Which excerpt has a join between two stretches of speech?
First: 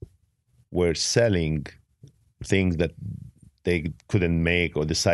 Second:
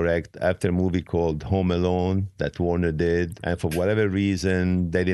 second; 1 cut; at 3.4 s

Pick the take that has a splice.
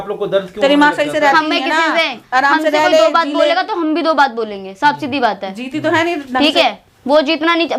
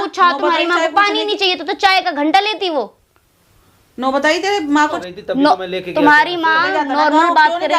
second; 1 cut; at 5.0 s

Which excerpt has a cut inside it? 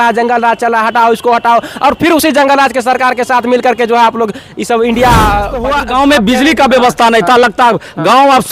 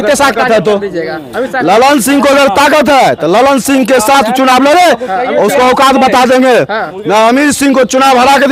first; 1 cut; at 5.6 s

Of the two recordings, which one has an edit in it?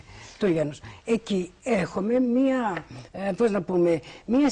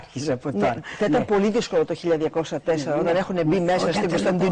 first; 1 cut; at 1.5 s

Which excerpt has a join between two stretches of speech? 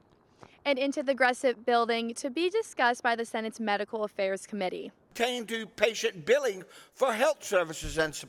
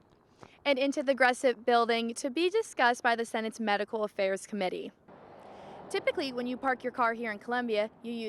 second; 1 cut; at 5.0 s

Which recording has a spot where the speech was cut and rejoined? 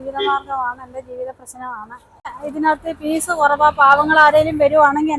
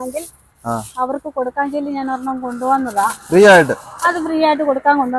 first; 1 cut; at 2.4 s

